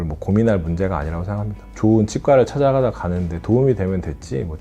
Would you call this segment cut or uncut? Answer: cut